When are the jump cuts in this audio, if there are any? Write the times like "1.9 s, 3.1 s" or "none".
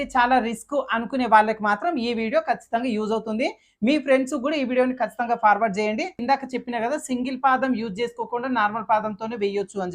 6.1 s